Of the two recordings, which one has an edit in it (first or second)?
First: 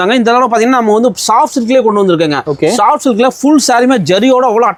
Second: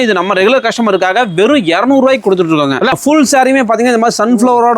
second